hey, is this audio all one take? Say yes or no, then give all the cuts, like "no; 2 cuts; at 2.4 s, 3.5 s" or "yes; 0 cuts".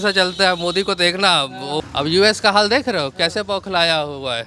no; 1 cut; at 1.8 s